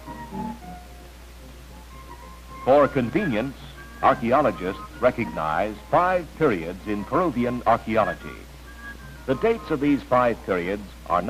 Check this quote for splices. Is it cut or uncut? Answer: uncut